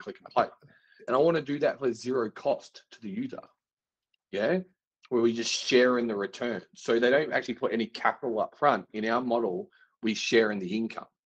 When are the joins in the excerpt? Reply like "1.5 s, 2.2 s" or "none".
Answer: 1.1 s